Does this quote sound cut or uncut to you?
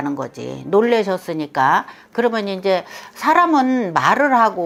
uncut